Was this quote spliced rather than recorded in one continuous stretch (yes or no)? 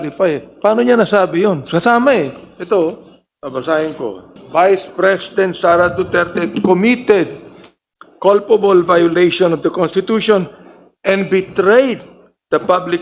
yes